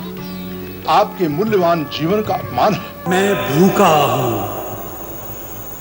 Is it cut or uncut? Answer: cut